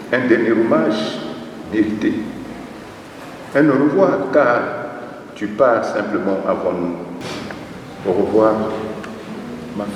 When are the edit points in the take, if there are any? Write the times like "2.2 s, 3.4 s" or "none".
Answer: 7.2 s